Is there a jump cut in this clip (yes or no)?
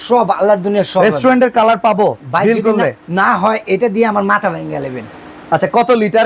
no